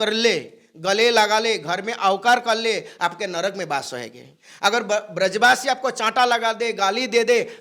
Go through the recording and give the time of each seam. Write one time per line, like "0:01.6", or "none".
none